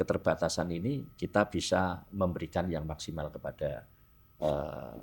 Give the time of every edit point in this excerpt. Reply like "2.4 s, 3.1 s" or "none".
none